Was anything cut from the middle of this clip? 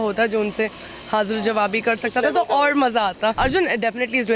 yes; 1 cut; at 3.4 s

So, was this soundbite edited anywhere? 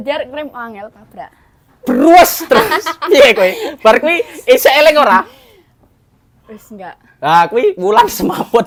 no; 0 cuts

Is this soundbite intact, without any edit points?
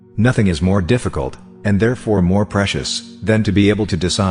yes; 0 cuts

